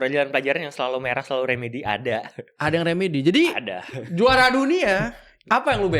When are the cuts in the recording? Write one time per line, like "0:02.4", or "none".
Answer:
none